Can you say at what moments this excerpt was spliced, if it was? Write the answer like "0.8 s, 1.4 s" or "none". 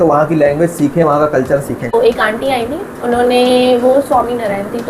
1.9 s